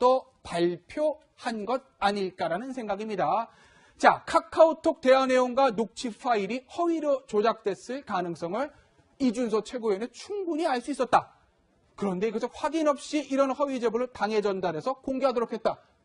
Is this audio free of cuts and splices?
no; 1 cut; at 13.1 s

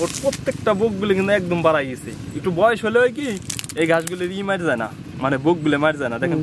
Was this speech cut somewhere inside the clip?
no; 0 cuts

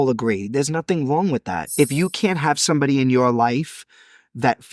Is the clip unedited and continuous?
yes; 0 cuts

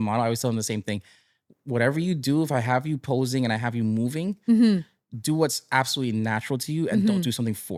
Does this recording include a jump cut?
no; 0 cuts

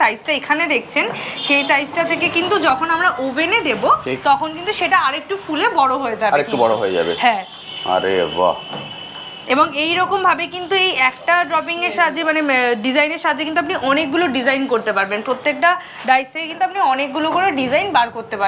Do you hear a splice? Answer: no; 0 cuts

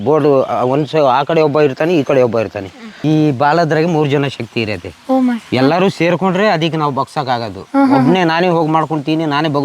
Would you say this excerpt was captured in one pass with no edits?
no; 1 cut; at 3.0 s

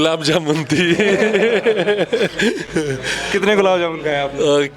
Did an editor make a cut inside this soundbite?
no; 0 cuts

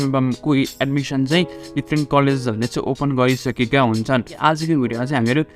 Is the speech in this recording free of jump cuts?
no; 1 cut; at 4.4 s

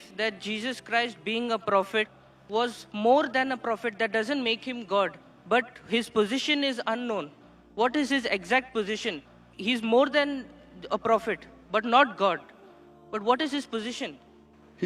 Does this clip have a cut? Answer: no; 0 cuts

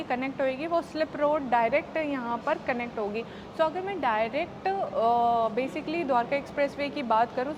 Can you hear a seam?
no; 0 cuts

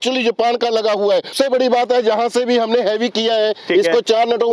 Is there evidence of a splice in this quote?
yes; 1 cut; at 1.3 s

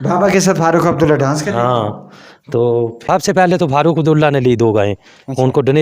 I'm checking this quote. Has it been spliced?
yes; 1 cut; at 3.0 s

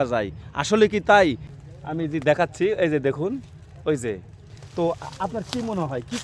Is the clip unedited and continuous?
no; 1 cut; at 1.5 s

